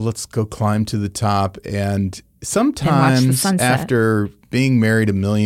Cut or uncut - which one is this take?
cut